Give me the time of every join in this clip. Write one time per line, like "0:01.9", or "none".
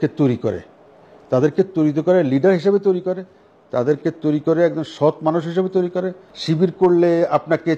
0:06.3

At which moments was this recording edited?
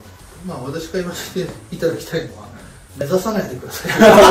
none

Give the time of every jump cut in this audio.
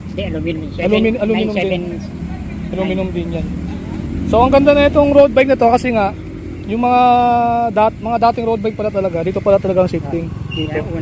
none

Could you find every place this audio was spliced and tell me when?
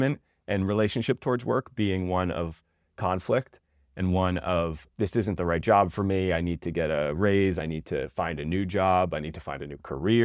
0:07.6

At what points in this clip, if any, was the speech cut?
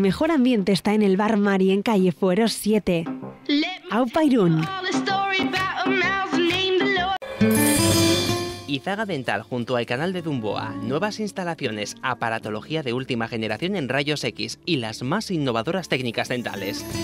0:07.3

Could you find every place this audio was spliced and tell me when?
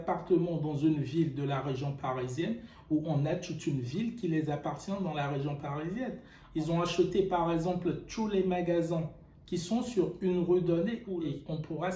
0:06.4
0:11.1

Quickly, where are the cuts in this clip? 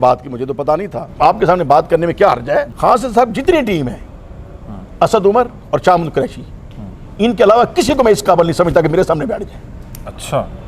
0:01.1
0:02.7

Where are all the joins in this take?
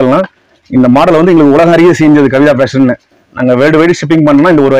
none

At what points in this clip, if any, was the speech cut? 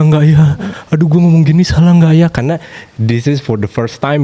none

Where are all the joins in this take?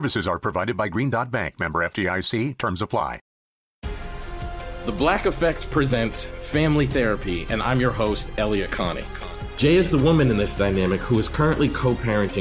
0:03.3

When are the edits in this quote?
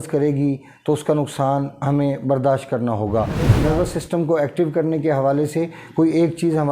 0:03.6

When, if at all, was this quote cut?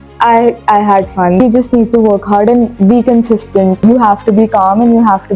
0:01.4
0:03.8

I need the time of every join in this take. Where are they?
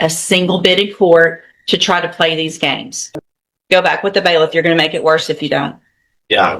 0:02.9

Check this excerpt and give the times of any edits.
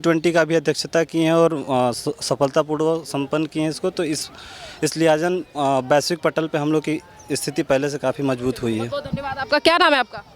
none

